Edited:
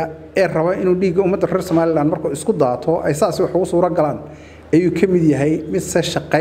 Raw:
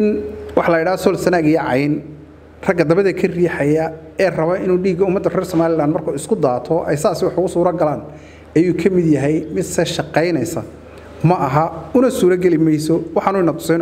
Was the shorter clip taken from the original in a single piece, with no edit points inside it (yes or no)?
yes